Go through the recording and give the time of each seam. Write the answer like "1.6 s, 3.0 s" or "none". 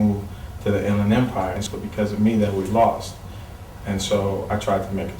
1.7 s

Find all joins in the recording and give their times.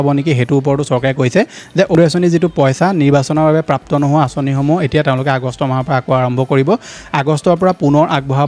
none

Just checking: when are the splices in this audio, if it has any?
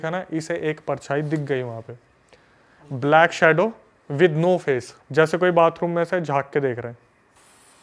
5.0 s

